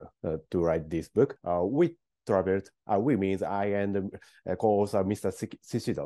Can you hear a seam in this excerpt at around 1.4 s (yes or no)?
yes